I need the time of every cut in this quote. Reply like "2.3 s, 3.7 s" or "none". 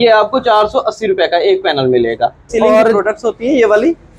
2.9 s